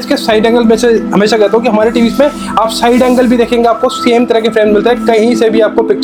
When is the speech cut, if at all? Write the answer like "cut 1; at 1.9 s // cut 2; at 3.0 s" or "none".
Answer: none